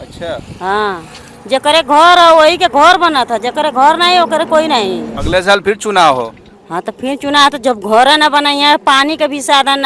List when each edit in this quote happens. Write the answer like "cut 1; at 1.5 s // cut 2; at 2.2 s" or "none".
cut 1; at 5.1 s